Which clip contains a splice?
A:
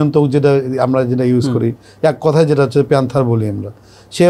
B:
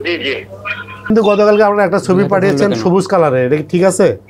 B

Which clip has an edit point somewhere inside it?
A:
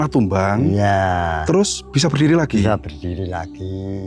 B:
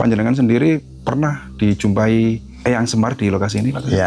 B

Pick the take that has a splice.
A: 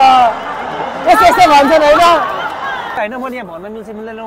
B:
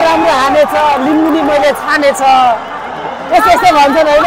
A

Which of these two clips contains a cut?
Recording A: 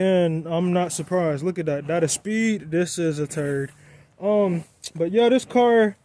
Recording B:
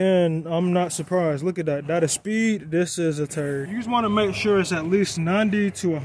B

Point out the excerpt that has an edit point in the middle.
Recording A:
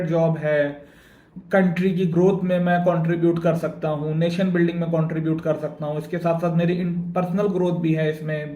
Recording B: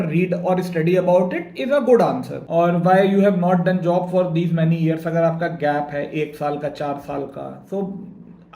B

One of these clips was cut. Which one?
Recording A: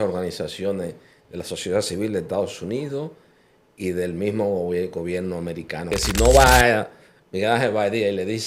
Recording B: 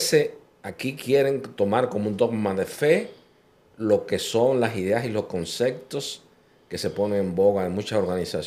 A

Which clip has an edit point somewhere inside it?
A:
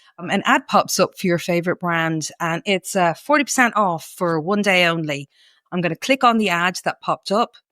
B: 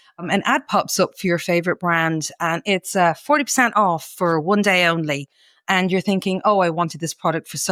A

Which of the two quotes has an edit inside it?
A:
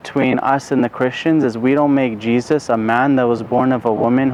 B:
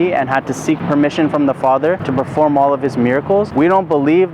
B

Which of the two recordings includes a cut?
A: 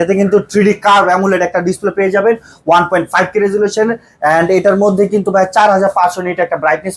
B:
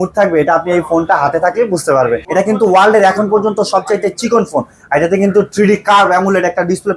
B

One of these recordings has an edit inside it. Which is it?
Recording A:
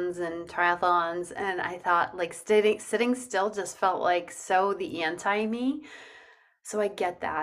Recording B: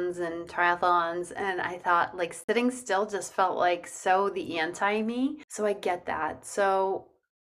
B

